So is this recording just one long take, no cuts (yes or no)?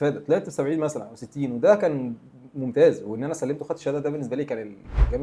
yes